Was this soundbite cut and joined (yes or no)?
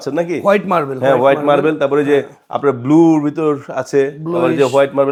no